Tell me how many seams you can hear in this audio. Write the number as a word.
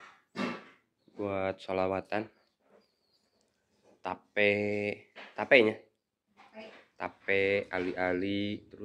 zero